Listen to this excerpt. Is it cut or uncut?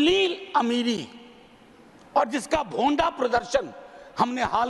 uncut